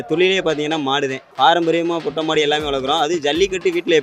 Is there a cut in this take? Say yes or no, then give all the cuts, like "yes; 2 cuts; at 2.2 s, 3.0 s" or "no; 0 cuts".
no; 0 cuts